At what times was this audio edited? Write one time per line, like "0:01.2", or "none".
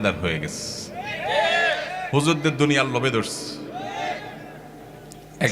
none